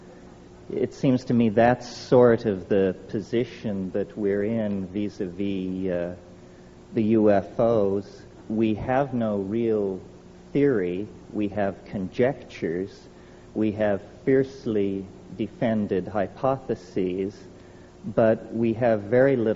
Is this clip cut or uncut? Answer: cut